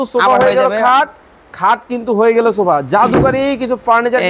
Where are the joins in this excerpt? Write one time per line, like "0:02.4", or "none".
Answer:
none